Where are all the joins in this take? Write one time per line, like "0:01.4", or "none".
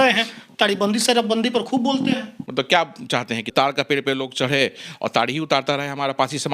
0:02.4
0:03.5